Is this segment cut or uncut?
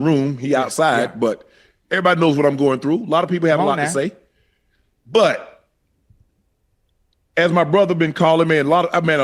uncut